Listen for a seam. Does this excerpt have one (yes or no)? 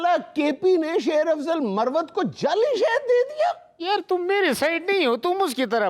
no